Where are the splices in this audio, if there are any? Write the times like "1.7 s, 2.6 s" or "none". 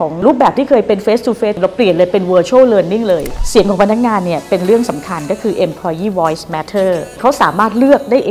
1.6 s, 3.3 s, 7.1 s